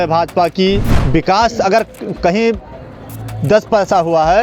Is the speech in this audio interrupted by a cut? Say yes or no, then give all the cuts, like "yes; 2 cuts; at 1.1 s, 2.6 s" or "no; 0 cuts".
yes; 1 cut; at 0.9 s